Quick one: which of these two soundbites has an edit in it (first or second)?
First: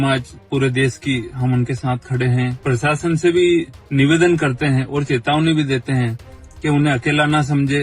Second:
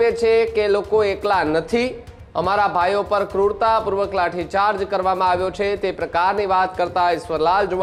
first